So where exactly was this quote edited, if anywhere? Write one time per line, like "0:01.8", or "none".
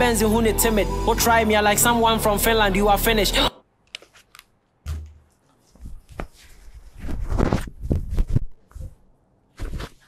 0:03.6